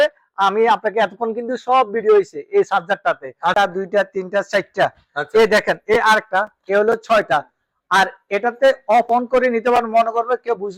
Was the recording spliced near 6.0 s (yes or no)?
no